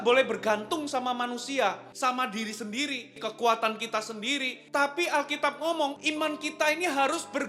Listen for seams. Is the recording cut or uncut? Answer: cut